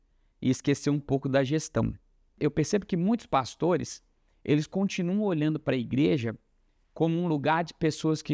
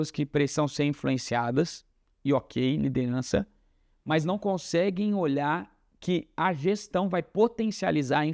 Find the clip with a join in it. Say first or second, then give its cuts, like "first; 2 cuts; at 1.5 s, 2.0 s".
first; 1 cut; at 2.4 s